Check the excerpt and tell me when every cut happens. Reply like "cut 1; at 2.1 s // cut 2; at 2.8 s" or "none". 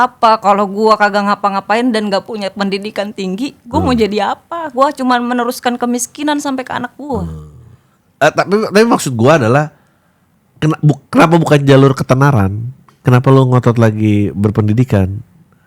none